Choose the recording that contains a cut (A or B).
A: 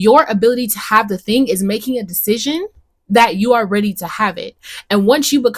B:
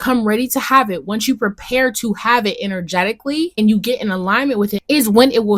B